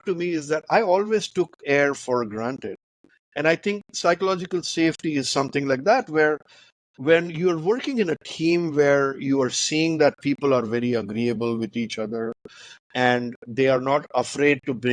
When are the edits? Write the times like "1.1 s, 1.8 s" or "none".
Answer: none